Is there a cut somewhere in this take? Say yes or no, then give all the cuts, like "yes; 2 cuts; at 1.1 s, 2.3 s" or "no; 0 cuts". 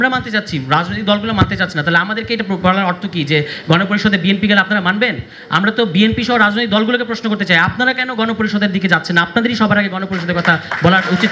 no; 0 cuts